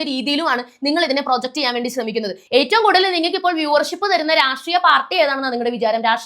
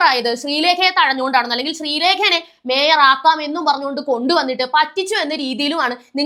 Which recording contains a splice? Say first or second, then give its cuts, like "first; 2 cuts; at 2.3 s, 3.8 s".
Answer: first; 1 cut; at 2.4 s